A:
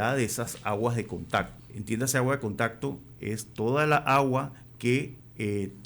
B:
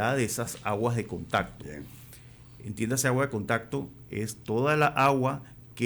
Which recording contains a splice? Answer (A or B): A